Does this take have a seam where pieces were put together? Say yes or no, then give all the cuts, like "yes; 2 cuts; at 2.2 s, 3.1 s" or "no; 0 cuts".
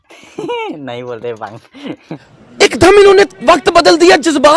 no; 0 cuts